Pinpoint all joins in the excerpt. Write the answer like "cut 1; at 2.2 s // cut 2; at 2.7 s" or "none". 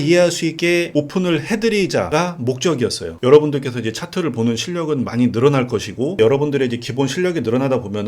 cut 1; at 0.8 s // cut 2; at 2.1 s // cut 3; at 3.1 s